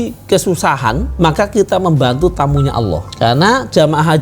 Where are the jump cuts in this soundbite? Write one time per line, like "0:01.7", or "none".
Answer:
0:03.1